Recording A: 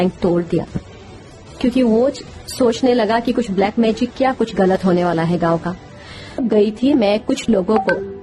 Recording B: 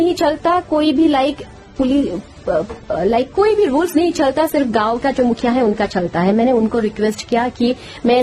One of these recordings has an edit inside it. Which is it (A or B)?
A